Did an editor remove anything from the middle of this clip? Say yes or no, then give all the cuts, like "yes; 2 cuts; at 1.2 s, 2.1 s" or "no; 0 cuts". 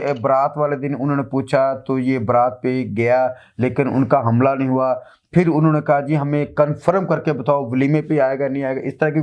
no; 0 cuts